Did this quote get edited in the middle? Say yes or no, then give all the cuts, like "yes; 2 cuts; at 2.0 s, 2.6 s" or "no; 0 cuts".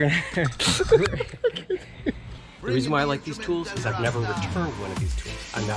yes; 1 cut; at 2.4 s